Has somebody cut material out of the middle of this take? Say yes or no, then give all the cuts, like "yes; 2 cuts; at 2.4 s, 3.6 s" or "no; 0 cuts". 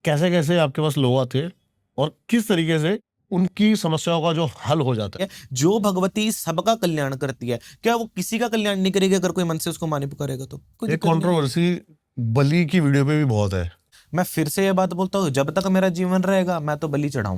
yes; 4 cuts; at 3.1 s, 5.1 s, 10.8 s, 13.9 s